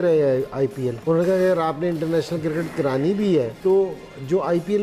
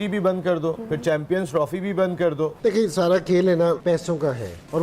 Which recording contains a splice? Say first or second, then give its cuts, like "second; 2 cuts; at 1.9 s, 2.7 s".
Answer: second; 1 cut; at 2.6 s